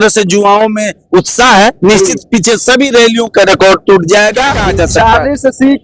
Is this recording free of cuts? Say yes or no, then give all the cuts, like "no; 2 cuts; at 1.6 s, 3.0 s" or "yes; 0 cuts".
no; 1 cut; at 4.6 s